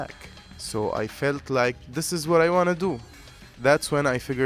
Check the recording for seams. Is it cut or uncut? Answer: uncut